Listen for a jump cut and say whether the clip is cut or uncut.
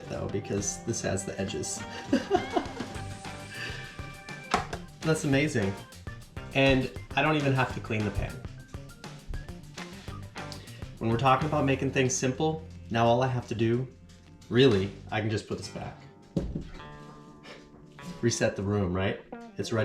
cut